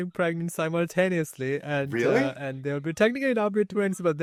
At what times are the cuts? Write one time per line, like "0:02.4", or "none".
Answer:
none

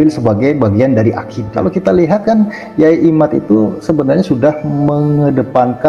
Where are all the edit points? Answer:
0:01.3

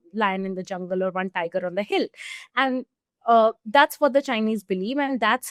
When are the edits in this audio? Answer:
none

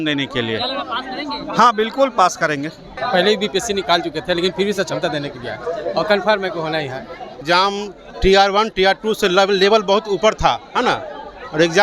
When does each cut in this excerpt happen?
0:02.9
0:07.4

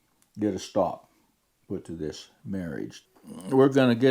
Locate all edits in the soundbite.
0:03.0

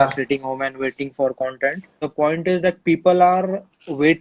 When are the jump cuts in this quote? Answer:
0:02.0

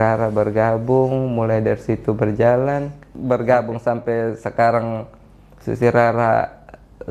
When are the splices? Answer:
0:03.1

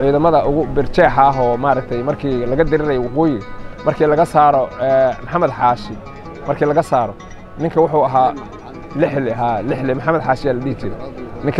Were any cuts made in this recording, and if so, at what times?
none

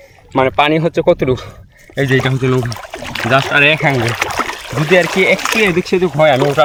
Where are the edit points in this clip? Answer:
none

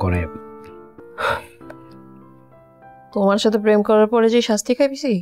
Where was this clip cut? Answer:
0:00.9

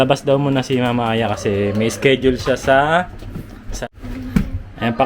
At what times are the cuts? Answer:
0:03.8

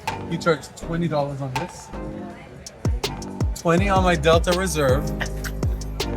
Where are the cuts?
0:05.0

